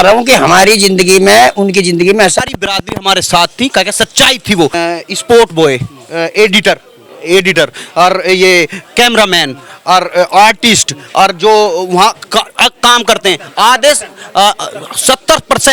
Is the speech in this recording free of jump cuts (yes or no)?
no